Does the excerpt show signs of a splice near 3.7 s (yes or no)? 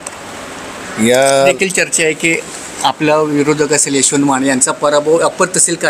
no